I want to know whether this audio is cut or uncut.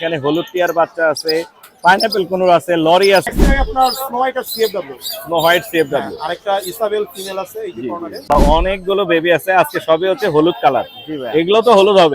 cut